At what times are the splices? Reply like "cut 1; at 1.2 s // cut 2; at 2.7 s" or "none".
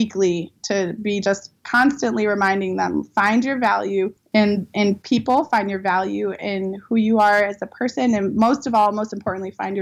cut 1; at 4.4 s